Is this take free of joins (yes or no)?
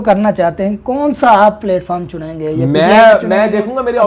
yes